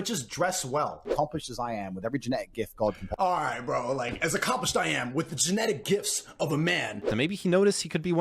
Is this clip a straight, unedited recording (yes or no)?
no